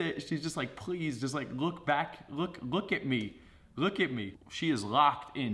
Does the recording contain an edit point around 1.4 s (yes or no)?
no